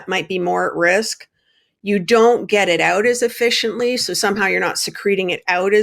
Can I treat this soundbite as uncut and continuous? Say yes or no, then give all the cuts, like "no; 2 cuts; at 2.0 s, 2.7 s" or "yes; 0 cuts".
yes; 0 cuts